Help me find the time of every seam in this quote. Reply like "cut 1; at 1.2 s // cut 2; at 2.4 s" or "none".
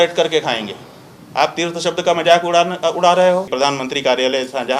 cut 1; at 3.5 s